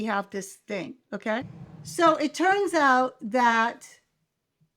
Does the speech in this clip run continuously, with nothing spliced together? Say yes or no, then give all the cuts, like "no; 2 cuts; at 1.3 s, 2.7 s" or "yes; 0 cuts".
no; 1 cut; at 1.6 s